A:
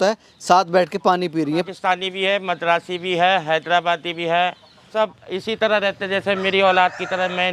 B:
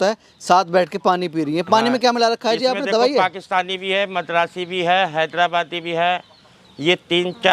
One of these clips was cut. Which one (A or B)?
A